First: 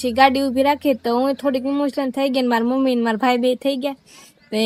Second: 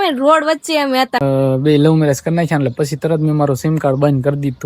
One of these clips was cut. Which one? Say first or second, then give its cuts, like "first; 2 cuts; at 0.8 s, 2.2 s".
second; 1 cut; at 1.2 s